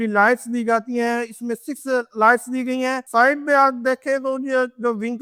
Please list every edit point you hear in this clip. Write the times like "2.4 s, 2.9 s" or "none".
none